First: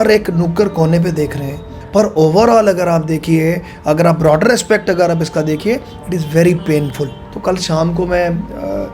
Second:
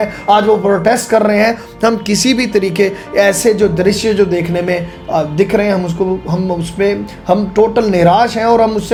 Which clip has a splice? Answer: first; 2 cuts; at 1.8 s, 7.3 s

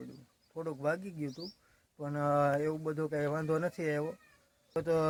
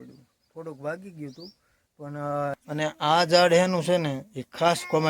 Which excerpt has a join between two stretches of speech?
second; 1 cut; at 2.6 s

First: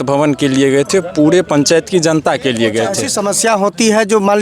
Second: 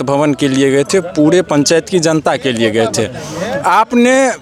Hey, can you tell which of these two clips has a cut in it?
first; 1 cut; at 3.1 s

